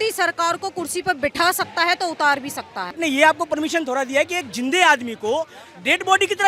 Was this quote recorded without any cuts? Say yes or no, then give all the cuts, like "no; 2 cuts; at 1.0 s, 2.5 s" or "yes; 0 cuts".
no; 1 cut; at 3.0 s